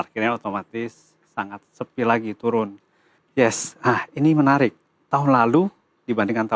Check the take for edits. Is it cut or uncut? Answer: cut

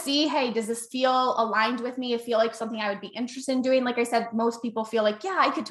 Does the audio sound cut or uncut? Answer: uncut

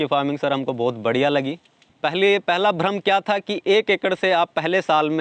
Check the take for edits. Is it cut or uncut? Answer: cut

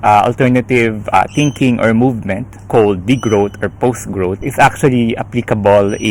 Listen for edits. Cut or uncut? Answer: uncut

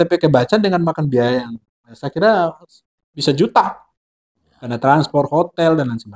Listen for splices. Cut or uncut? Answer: uncut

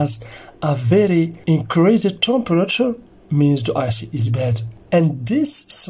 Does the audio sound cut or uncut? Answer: cut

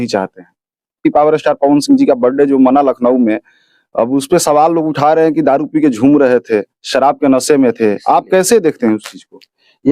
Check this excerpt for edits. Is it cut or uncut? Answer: cut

